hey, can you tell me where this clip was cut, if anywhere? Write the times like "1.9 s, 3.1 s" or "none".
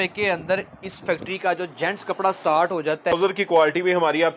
3.2 s